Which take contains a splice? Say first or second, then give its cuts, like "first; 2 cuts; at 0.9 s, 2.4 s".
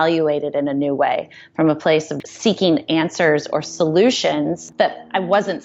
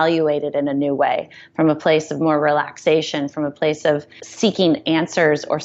first; 2 cuts; at 2.1 s, 4.6 s